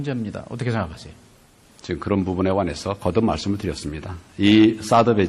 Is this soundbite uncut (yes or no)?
yes